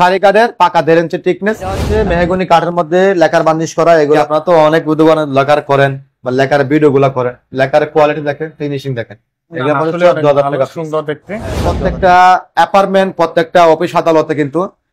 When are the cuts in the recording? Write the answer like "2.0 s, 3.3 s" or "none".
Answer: 1.8 s, 4.2 s, 11.6 s